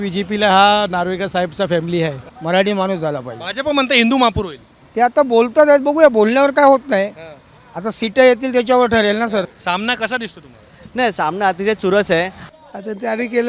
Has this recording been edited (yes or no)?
yes